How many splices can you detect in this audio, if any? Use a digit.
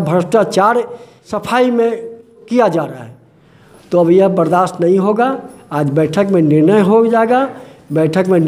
2